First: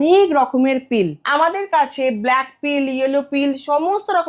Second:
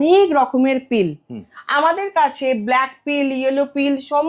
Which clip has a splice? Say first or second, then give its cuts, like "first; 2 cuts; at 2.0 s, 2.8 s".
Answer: first; 1 cut; at 1.2 s